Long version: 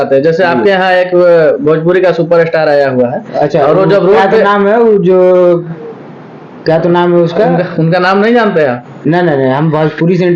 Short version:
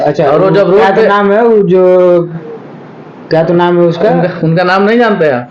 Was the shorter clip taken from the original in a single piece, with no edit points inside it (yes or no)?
yes